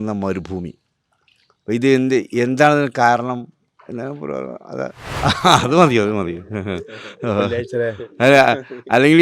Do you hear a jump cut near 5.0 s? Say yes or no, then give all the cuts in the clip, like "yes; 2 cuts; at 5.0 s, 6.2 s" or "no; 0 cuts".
yes; 1 cut; at 5.0 s